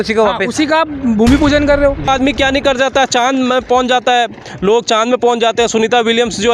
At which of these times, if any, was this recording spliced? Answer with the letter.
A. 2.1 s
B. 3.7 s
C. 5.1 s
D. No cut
A